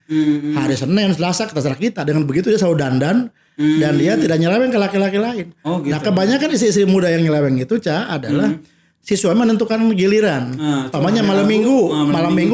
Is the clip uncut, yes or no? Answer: yes